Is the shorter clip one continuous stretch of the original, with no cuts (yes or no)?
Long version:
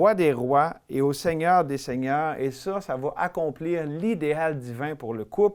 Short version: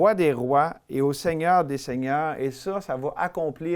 yes